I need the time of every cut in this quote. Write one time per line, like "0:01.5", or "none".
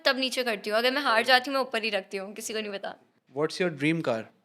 0:03.0

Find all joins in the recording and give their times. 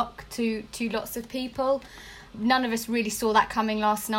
none

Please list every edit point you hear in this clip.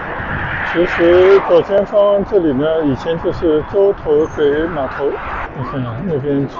0:05.4

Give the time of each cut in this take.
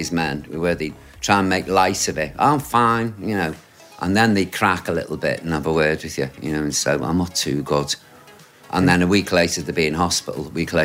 0:01.0

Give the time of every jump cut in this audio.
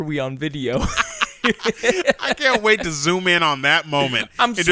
none

